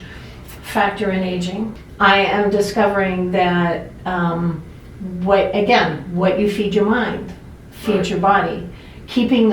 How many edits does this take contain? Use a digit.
1